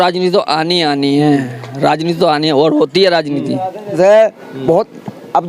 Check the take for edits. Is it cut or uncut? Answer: cut